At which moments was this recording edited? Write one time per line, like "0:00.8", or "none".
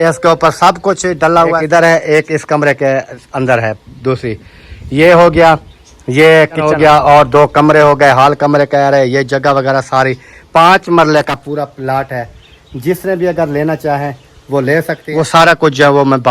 0:01.6
0:06.6
0:15.0